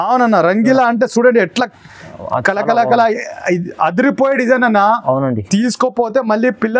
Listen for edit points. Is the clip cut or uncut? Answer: uncut